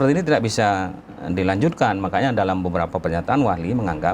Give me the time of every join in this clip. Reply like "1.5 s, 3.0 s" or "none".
none